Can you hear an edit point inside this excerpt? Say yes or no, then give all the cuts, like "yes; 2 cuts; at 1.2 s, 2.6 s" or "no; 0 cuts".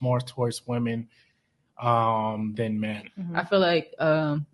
yes; 1 cut; at 3.2 s